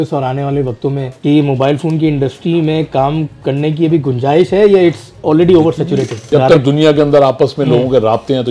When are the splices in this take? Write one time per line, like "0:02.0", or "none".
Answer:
0:01.1
0:06.3

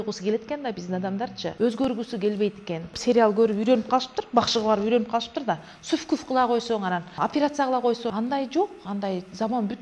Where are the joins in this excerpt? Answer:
0:01.5
0:02.9
0:07.1
0:08.1

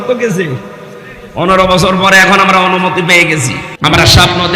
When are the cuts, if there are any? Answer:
0:03.6

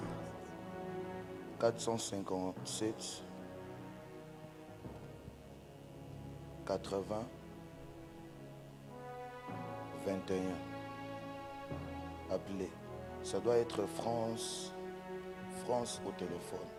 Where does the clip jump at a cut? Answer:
none

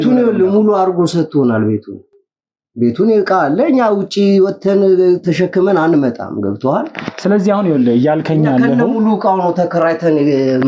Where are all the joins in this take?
none

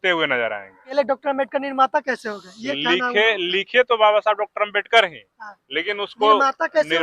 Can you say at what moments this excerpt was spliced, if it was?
0:00.9

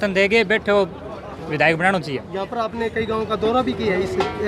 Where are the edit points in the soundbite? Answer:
none

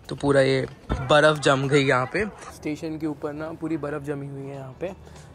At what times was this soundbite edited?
0:00.8
0:02.5

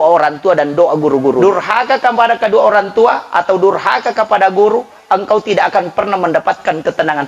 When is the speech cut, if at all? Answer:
0:01.4

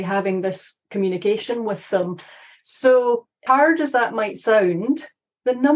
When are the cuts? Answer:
none

